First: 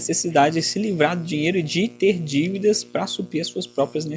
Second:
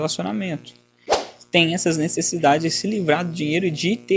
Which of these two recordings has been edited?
second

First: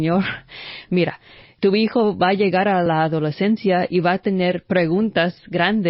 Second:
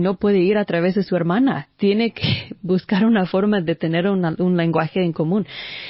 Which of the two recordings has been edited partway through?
first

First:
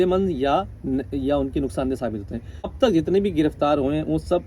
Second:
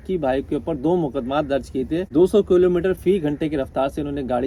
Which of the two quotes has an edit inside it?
first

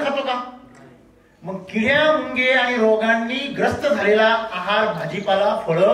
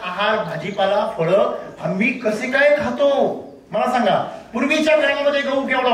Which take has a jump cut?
second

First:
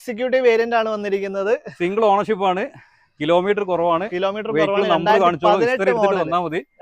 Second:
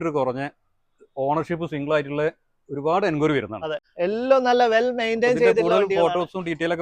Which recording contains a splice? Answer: second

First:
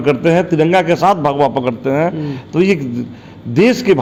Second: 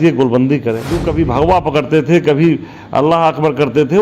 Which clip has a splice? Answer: second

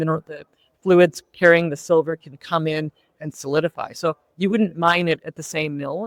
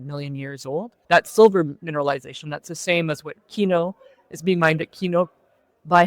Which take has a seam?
second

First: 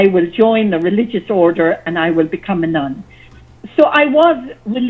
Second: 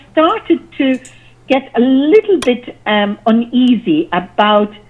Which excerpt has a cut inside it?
first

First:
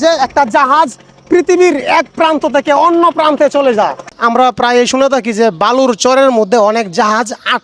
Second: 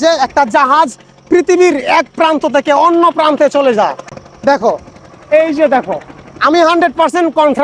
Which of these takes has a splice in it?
first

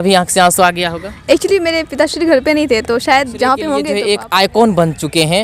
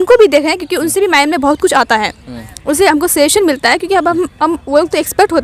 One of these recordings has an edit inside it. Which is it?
first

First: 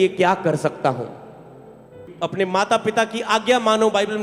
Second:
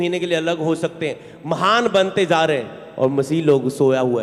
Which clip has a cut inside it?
first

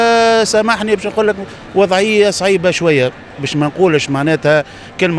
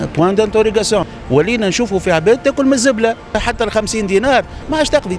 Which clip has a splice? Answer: second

